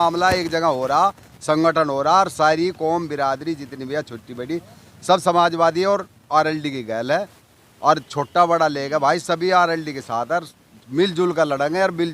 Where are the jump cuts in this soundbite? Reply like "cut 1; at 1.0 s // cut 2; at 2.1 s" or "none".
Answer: none